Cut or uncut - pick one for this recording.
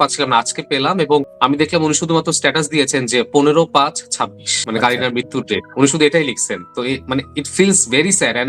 cut